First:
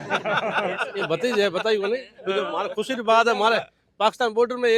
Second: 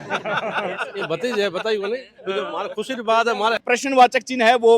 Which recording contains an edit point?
second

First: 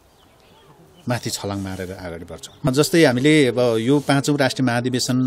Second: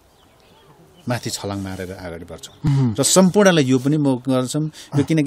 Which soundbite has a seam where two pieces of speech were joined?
first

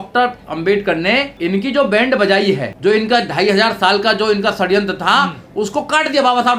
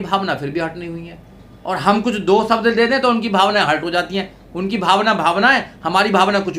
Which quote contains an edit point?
first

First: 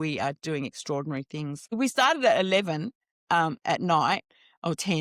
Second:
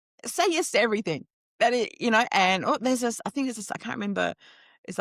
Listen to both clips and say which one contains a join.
first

